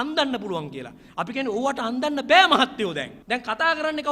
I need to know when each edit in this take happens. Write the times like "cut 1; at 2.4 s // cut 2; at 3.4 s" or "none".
cut 1; at 3.1 s

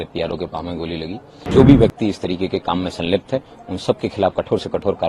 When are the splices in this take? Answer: cut 1; at 1.3 s

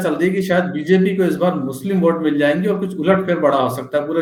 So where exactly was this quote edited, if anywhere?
none

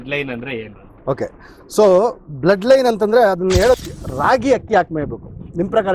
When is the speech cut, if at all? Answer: cut 1; at 3.8 s

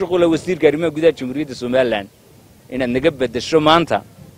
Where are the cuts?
none

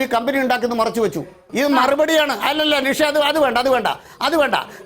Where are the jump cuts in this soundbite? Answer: cut 1; at 1.4 s

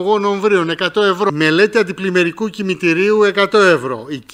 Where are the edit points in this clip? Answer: cut 1; at 1.3 s

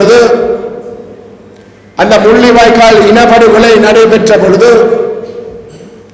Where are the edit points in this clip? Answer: none

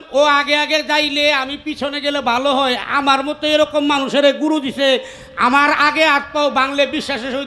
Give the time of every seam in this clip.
none

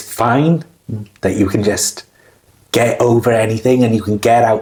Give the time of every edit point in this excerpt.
none

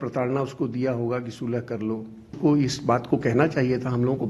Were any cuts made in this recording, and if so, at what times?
cut 1; at 2.3 s

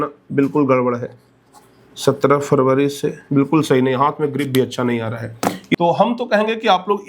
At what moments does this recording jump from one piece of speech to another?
cut 1; at 5.7 s

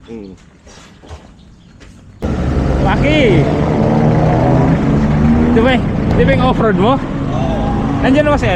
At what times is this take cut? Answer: cut 1; at 2.2 s

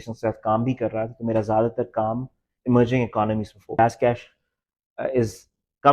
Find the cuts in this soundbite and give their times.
cut 1; at 3.8 s

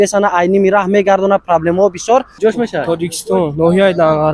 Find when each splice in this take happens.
cut 1; at 2.3 s

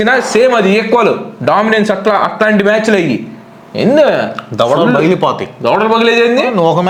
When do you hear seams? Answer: none

